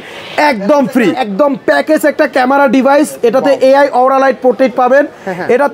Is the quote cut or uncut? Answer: cut